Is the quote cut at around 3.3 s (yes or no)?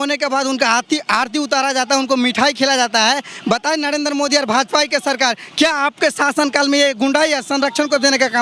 no